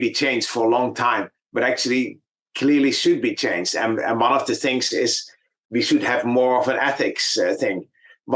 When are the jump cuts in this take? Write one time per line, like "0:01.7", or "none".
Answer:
none

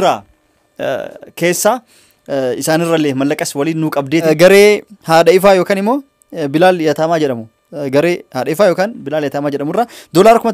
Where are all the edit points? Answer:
0:04.2

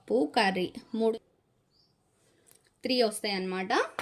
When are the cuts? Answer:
0:01.1

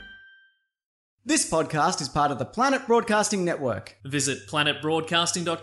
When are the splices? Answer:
0:01.1

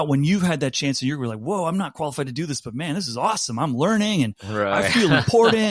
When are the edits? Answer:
none

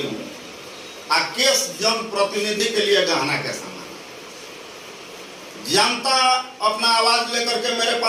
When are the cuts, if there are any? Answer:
none

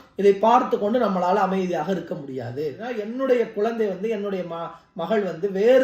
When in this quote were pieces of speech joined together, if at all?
0:02.9

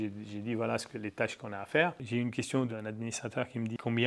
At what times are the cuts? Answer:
0:02.7

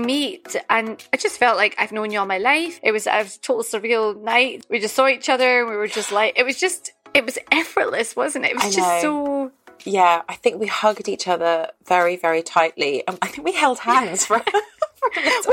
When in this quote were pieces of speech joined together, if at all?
0:01.0
0:02.7
0:04.6

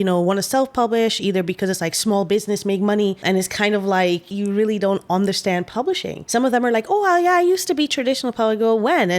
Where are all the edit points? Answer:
0:03.2
0:04.3
0:06.1

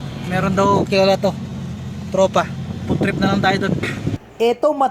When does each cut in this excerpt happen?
0:03.8

